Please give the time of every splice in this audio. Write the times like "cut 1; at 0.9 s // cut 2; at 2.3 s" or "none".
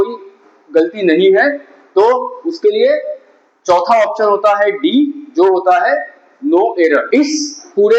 cut 1; at 7.1 s